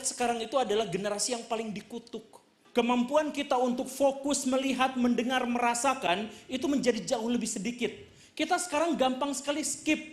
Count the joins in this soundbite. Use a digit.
1